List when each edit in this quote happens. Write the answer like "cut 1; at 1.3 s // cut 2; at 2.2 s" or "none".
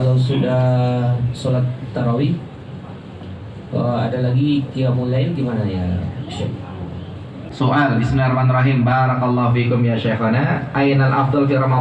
cut 1; at 7.5 s